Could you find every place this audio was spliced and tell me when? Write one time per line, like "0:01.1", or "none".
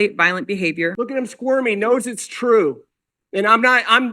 0:01.0